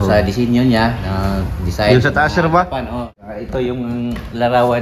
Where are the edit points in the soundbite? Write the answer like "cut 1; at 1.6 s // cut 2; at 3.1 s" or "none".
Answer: cut 1; at 3.1 s